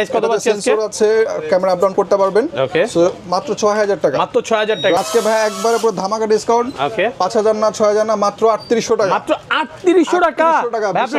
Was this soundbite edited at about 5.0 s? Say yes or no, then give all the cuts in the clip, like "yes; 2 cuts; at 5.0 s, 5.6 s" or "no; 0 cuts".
yes; 1 cut; at 5.0 s